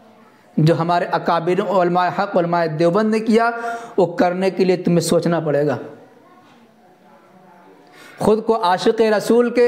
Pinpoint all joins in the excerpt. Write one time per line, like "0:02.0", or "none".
none